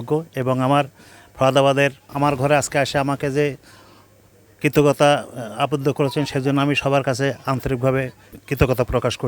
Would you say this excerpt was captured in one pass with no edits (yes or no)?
no